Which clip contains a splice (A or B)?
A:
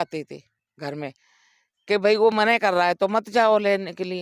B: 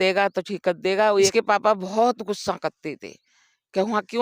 B